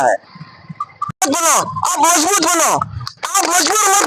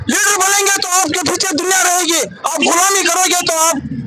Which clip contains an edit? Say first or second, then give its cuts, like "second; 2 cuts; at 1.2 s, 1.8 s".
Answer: first; 1 cut; at 1.2 s